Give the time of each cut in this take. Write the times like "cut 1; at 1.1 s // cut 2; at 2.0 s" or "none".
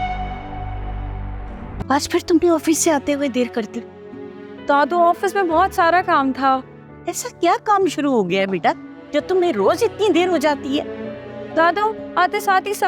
cut 1; at 1.8 s